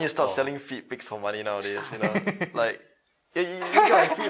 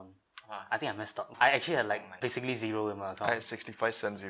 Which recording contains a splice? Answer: second; 2 cuts; at 1.3 s, 2.1 s

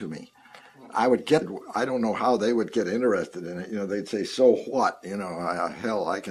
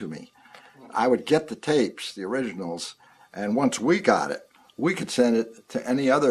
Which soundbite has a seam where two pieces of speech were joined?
second; 1 cut; at 1.5 s

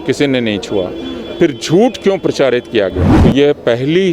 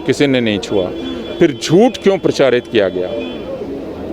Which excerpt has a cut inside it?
first; 1 cut; at 3.1 s

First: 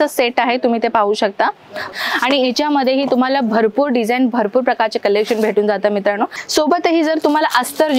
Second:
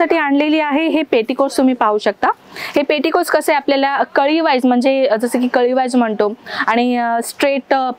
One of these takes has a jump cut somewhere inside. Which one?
first; 2 cuts; at 1.9 s, 6.4 s

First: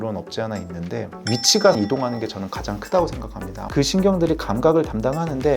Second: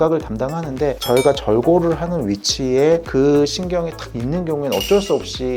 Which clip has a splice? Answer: first; 1 cut; at 3.7 s

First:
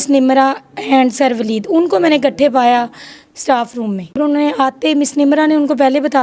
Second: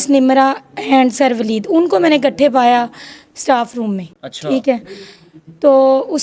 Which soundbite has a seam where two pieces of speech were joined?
first; 1 cut; at 4.2 s

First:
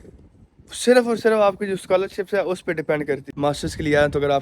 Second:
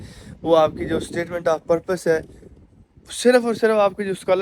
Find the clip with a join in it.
first; 1 cut; at 3.3 s

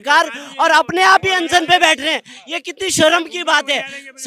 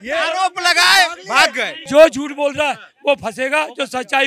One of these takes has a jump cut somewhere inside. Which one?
second; 1 cut; at 1.7 s

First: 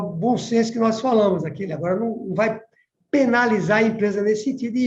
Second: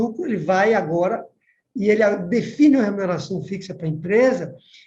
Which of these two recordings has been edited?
first; 1 cut; at 1.6 s

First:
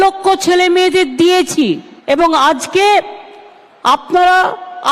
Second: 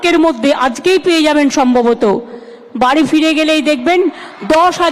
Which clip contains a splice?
first; 1 cut; at 1.9 s

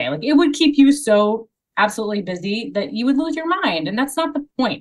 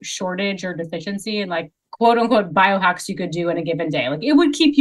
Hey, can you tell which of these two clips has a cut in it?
second; 1 cut; at 1.8 s

